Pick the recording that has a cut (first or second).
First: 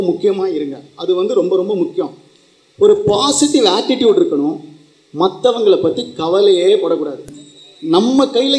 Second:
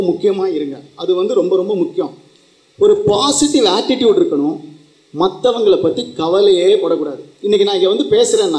first